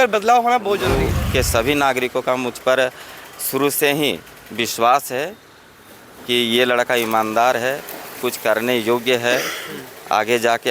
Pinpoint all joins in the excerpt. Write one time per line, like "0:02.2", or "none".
0:01.0